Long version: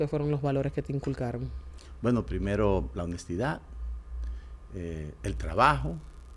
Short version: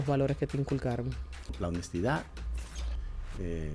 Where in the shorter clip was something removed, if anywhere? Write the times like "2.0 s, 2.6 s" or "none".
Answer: 1.6 s